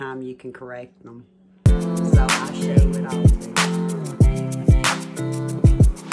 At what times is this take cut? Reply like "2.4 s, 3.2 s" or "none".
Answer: 1.4 s